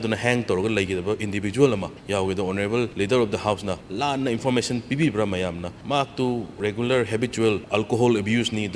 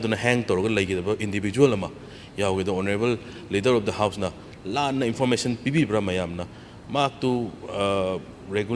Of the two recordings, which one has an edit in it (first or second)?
first